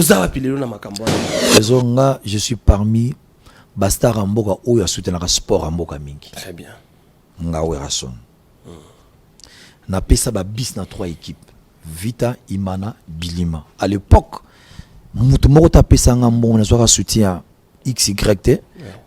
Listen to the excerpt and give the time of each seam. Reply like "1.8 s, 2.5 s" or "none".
1.3 s